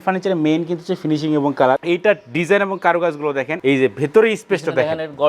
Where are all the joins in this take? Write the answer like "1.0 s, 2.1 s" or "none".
1.8 s, 3.5 s